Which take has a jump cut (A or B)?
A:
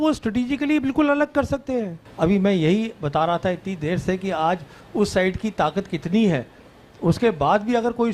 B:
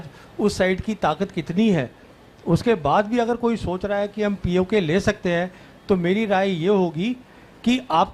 A